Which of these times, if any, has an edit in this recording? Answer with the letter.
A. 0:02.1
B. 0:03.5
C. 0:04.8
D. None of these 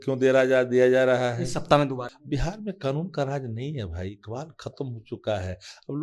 A